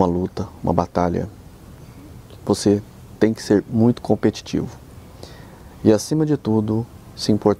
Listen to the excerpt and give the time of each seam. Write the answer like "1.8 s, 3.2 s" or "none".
none